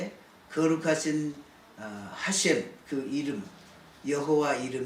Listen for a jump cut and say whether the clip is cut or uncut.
uncut